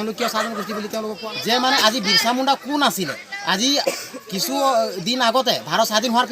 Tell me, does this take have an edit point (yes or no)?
yes